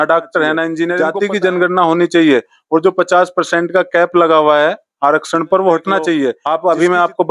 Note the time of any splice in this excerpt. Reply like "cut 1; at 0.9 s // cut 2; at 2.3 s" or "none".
cut 1; at 1.0 s // cut 2; at 6.4 s